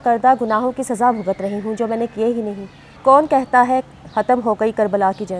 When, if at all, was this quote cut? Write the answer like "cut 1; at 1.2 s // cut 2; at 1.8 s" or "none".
cut 1; at 2.9 s